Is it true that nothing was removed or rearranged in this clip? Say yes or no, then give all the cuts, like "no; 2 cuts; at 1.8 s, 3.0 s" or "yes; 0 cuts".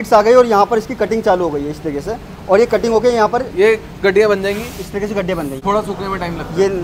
no; 1 cut; at 5.6 s